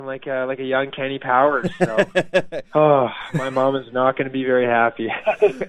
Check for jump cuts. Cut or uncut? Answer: cut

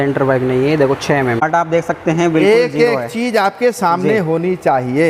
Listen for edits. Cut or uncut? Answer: cut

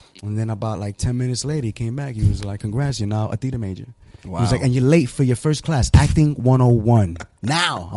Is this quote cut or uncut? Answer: uncut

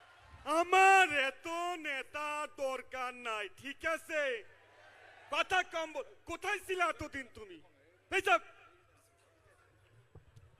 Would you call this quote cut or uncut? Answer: uncut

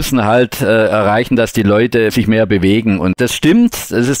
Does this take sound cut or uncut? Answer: cut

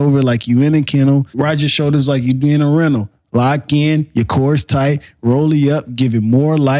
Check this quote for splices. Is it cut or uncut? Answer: cut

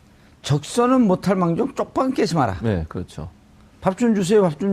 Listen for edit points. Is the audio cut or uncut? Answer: cut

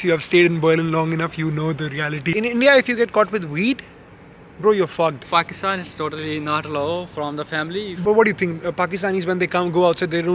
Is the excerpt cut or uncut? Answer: cut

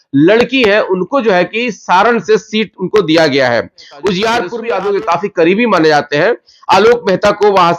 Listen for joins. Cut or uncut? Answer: cut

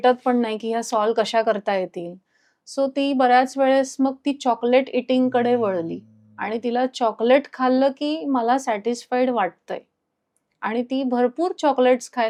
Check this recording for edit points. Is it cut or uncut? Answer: uncut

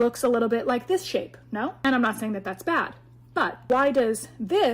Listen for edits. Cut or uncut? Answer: cut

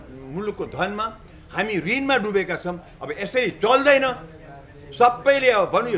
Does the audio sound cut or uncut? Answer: uncut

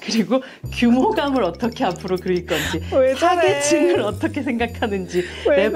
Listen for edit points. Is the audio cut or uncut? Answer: uncut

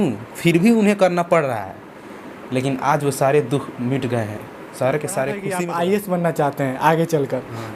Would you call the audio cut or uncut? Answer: cut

